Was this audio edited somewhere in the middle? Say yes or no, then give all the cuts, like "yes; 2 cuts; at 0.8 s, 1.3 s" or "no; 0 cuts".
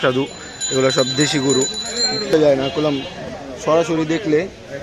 yes; 1 cut; at 2.3 s